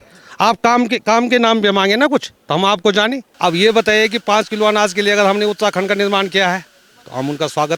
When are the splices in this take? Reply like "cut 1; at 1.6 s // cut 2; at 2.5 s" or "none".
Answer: cut 1; at 3.3 s